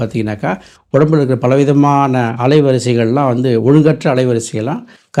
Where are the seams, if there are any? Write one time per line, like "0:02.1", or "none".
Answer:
none